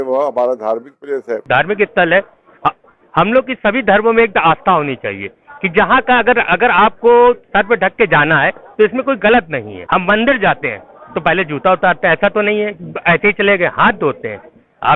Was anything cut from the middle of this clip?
yes; 2 cuts; at 1.4 s, 9.8 s

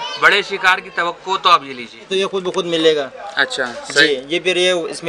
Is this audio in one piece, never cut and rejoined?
no; 1 cut; at 2.1 s

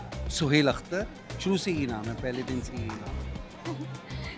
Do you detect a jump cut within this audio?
no; 0 cuts

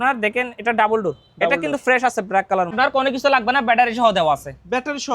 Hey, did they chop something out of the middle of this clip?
yes; 1 cut; at 2.7 s

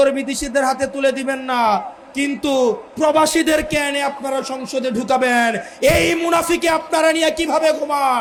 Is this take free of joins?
yes; 0 cuts

